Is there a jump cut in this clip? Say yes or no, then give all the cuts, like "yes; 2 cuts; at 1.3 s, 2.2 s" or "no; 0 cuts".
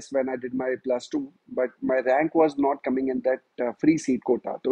yes; 1 cut; at 1.3 s